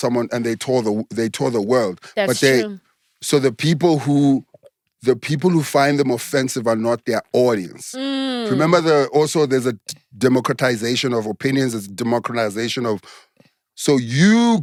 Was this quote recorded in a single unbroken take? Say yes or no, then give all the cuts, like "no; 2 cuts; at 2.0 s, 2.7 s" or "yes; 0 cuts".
yes; 0 cuts